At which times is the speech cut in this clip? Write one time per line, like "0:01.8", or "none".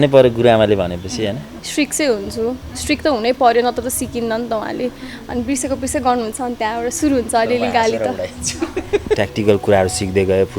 0:01.5
0:09.2